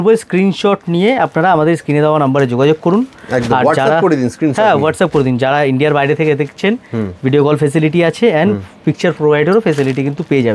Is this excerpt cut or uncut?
uncut